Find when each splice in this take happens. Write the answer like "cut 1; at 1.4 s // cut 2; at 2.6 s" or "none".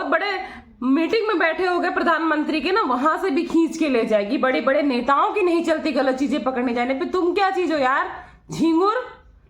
none